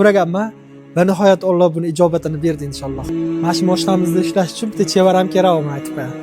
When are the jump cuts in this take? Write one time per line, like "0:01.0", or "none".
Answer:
0:03.1